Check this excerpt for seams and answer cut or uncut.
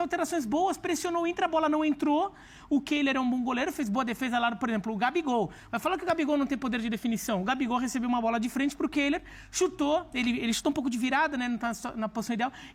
uncut